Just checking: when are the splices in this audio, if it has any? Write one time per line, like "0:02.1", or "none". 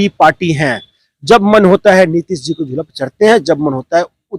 none